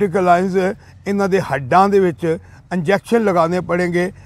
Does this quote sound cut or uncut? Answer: uncut